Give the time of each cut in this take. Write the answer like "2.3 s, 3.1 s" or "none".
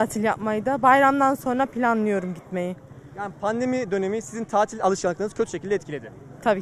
none